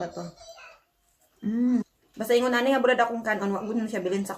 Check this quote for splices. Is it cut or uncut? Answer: cut